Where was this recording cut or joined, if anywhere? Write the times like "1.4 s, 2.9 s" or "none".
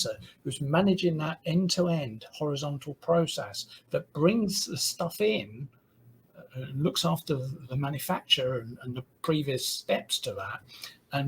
none